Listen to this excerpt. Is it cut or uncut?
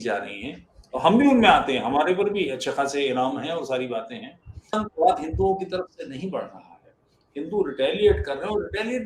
cut